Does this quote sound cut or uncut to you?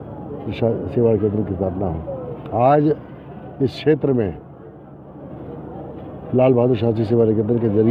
uncut